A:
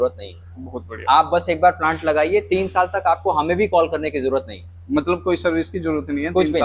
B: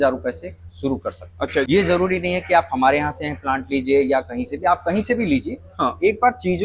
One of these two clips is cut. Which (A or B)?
B